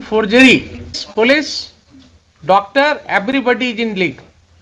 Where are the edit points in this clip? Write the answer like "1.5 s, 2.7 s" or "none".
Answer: 1.0 s